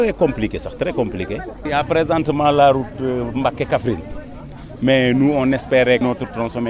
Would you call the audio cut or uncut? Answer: uncut